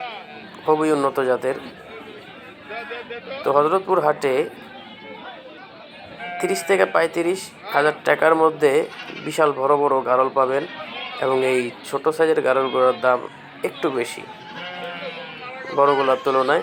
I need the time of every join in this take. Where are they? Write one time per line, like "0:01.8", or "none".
none